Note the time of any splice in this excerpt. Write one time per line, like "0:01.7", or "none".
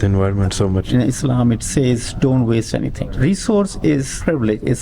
0:03.0

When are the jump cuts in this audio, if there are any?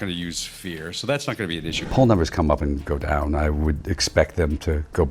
0:01.8

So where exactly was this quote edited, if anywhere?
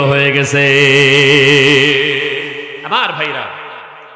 0:02.8

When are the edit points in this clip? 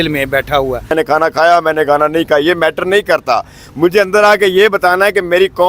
0:00.9

